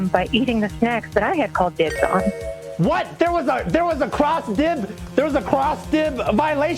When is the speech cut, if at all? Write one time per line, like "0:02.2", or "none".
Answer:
none